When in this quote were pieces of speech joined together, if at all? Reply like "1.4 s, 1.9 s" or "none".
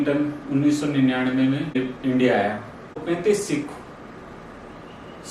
1.8 s, 3.0 s